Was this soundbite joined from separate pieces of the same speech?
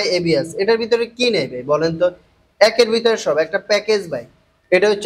no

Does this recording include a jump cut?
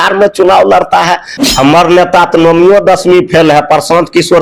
yes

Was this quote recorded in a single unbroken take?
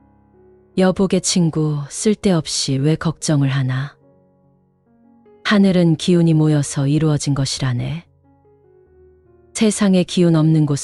yes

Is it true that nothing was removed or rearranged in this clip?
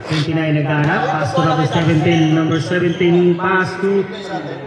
yes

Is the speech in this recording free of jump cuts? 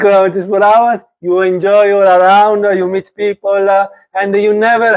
yes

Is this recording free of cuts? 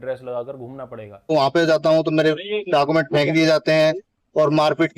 no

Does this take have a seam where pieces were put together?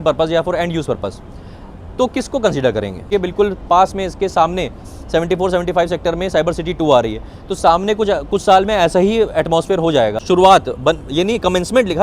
yes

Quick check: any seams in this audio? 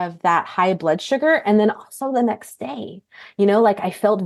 no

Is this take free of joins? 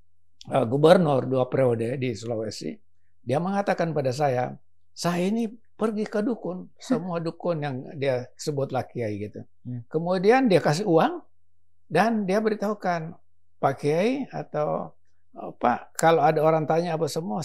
yes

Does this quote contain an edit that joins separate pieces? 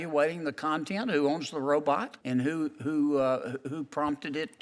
yes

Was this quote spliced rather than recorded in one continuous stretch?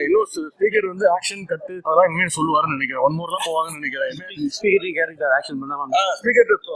yes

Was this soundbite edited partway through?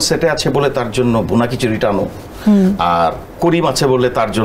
yes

